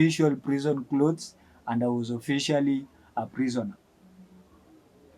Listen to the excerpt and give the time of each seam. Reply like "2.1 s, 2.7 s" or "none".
none